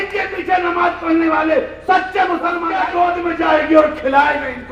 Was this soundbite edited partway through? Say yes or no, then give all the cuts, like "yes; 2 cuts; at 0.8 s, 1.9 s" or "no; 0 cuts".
yes; 1 cut; at 2.7 s